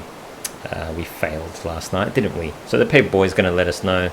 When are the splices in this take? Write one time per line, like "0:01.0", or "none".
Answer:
0:02.6